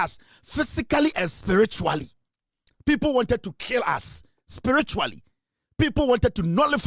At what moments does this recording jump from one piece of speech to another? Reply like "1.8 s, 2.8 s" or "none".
none